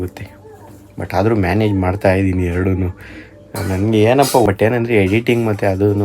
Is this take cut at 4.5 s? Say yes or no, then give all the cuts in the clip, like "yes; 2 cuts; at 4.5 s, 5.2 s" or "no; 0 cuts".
yes; 1 cut; at 4.5 s